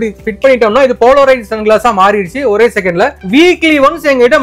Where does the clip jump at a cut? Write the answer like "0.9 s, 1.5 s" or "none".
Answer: 3.2 s

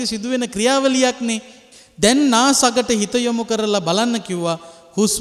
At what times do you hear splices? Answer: none

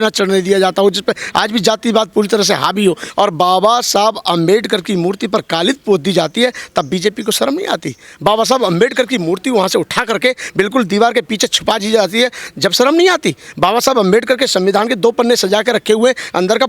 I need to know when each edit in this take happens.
3.0 s

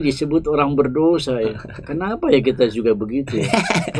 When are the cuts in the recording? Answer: none

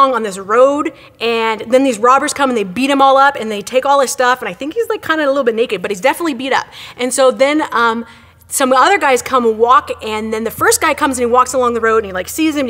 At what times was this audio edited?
5.8 s

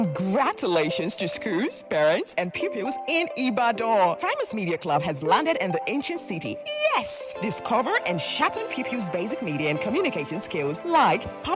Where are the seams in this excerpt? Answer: none

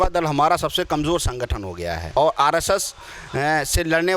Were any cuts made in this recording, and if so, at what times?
2.2 s

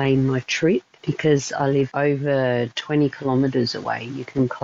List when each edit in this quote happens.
1.0 s, 1.9 s

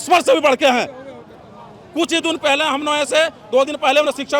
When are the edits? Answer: none

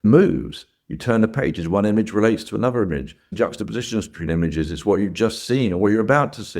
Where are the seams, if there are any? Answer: none

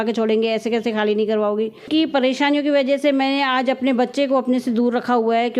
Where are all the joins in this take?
1.9 s

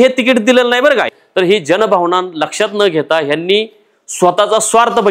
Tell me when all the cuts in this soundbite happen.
1.1 s

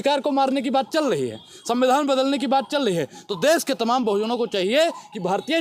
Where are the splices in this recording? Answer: none

